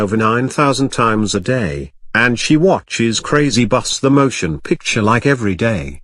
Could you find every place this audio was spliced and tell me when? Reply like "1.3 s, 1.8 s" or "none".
none